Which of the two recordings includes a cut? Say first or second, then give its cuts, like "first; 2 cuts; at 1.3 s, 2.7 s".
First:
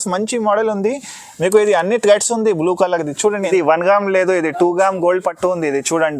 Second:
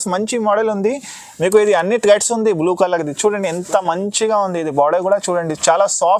first; 1 cut; at 3.5 s